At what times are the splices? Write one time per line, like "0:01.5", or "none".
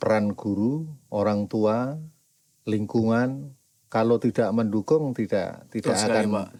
none